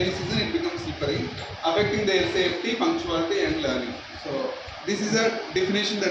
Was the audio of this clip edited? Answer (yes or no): no